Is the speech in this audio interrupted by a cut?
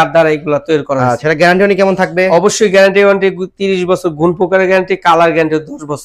no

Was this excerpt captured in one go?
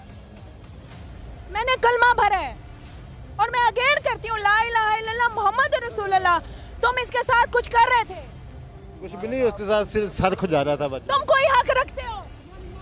yes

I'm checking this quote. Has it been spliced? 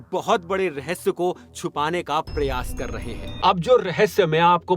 yes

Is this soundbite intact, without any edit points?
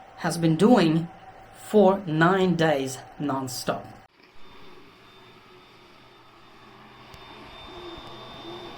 yes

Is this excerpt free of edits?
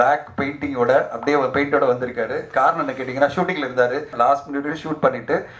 no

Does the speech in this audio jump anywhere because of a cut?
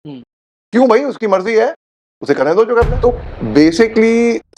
yes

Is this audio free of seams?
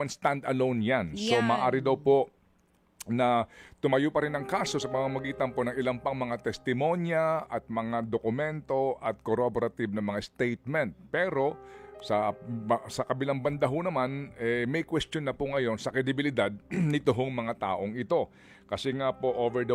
yes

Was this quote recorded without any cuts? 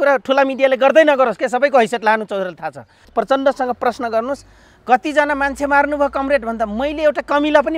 no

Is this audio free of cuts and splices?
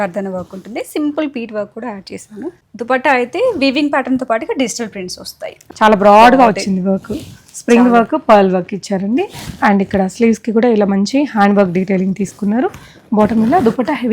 no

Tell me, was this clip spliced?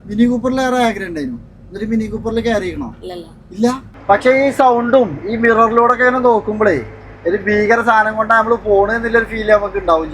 yes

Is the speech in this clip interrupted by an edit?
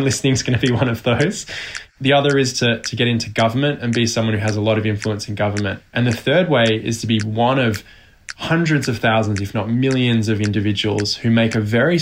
yes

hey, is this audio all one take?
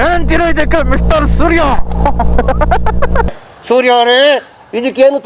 yes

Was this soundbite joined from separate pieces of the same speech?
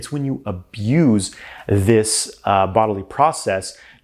no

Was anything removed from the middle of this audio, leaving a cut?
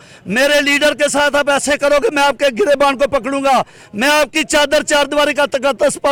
no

